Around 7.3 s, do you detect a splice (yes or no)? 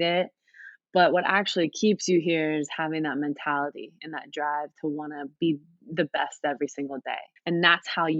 yes